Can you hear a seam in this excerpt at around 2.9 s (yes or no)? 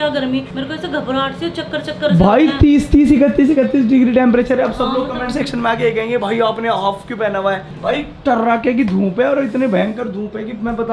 no